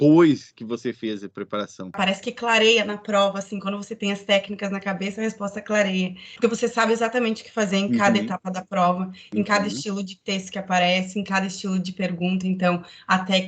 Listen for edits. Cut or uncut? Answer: cut